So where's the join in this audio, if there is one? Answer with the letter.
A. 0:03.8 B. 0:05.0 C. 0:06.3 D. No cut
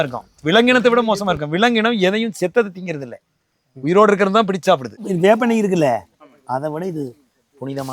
B